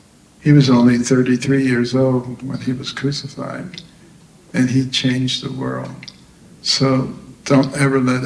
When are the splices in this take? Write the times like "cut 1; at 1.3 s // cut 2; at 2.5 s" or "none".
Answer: none